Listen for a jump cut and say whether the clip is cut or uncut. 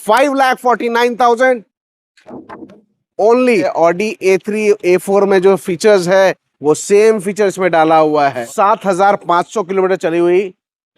cut